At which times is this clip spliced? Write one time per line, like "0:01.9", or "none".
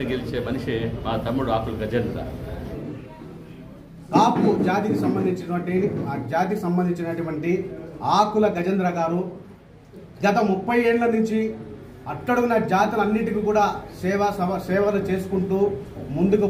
0:02.8